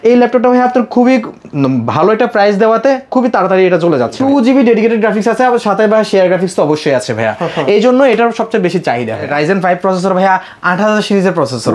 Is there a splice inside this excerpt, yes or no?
yes